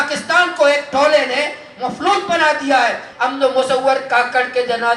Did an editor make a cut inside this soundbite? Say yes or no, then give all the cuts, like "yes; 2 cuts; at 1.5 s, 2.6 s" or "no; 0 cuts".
yes; 1 cut; at 3.0 s